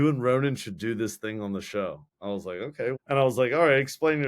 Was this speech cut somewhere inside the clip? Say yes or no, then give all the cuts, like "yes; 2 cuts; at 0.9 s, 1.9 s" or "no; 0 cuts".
yes; 1 cut; at 2.6 s